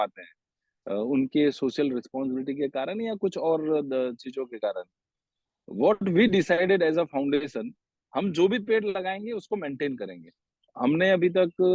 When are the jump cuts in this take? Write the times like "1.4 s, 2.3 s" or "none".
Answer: 10.7 s